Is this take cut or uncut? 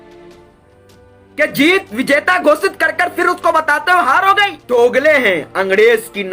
cut